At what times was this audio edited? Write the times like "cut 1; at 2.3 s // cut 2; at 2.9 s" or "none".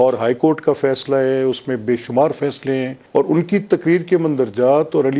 cut 1; at 3.0 s